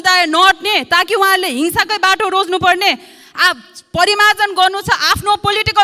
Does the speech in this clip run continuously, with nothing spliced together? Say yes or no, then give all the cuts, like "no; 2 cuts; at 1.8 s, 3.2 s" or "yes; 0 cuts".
yes; 0 cuts